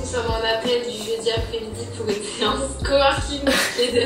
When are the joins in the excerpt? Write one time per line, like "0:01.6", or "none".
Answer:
none